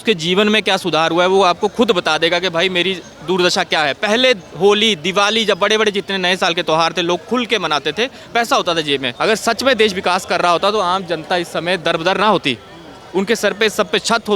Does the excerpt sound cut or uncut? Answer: cut